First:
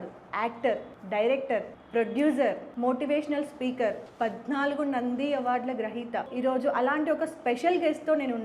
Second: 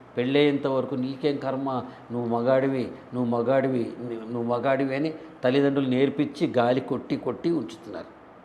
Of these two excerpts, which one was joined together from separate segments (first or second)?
first